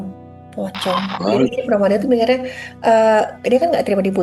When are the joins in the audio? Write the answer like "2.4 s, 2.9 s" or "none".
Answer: 1.1 s